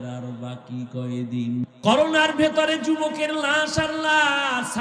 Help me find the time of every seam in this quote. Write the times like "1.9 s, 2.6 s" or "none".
1.6 s